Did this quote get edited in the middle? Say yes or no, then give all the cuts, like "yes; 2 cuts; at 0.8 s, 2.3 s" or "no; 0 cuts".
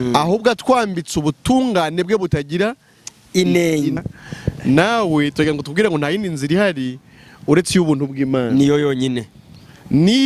yes; 1 cut; at 4.0 s